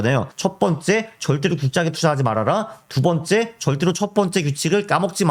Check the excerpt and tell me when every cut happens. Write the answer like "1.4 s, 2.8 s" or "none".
none